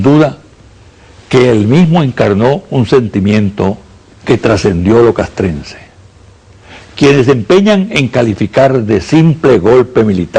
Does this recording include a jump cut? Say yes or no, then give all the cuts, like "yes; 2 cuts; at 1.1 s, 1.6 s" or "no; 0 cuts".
yes; 1 cut; at 7.9 s